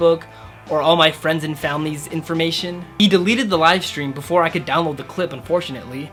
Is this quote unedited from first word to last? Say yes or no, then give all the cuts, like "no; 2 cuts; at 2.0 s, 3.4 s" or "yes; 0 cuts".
yes; 0 cuts